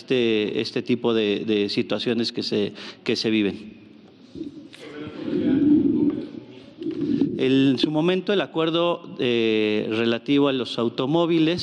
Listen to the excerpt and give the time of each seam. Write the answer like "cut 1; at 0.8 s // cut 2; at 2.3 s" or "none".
none